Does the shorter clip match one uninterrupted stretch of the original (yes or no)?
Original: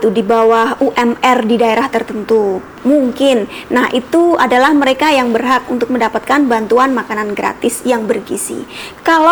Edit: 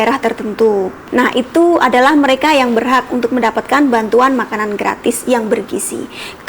no